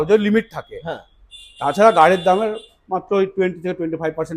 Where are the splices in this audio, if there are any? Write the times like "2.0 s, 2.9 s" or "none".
none

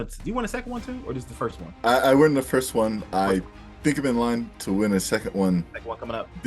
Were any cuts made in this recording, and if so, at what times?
1.7 s

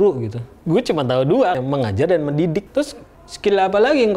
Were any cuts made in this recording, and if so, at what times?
1.6 s

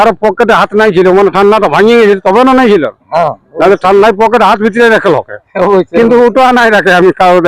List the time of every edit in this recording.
none

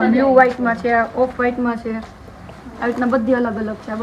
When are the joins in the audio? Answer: none

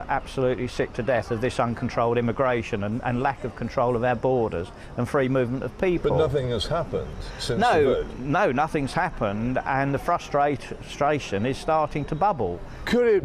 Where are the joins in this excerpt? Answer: 10.0 s

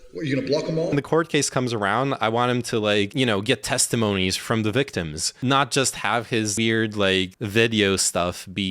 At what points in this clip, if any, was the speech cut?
0.9 s, 3.1 s, 4.4 s, 5.2 s, 6.5 s, 7.4 s

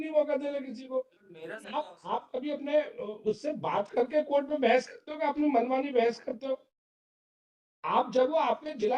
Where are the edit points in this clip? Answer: 1.6 s

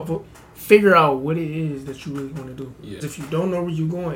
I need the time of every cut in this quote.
3.0 s

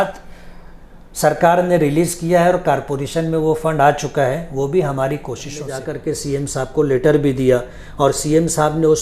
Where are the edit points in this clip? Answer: 5.7 s

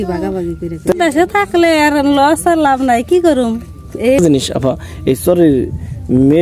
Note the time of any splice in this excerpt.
0.9 s, 4.2 s

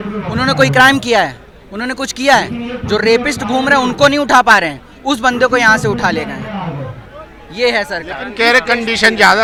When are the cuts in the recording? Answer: none

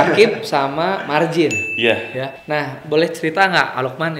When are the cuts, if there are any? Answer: 2.3 s

